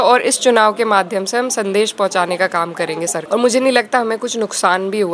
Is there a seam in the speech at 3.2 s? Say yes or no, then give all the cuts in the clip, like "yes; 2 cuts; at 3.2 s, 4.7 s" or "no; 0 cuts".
yes; 1 cut; at 3.2 s